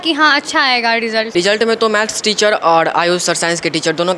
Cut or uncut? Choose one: cut